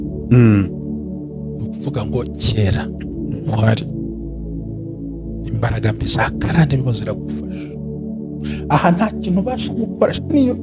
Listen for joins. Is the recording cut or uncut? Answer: cut